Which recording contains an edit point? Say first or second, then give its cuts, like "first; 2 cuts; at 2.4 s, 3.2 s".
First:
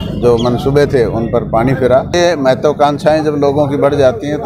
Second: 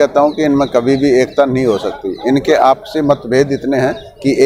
first; 1 cut; at 2.1 s